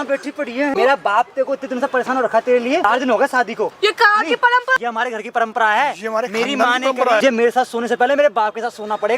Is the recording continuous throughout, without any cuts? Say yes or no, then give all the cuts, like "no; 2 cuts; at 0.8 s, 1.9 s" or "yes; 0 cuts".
no; 4 cuts; at 0.7 s, 2.9 s, 4.7 s, 7.2 s